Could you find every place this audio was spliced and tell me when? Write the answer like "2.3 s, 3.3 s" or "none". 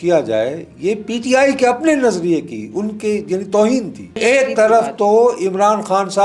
4.2 s